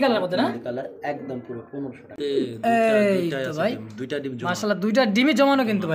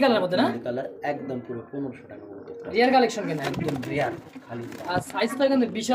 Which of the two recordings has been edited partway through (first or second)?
first